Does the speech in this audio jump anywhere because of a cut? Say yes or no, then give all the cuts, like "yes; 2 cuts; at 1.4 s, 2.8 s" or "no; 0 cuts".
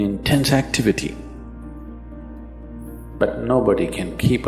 yes; 2 cuts; at 1.6 s, 3.0 s